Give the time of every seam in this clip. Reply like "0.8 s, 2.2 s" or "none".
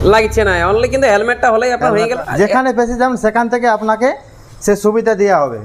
2.0 s